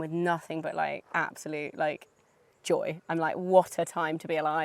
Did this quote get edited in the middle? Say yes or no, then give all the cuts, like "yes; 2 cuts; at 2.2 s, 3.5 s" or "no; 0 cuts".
no; 0 cuts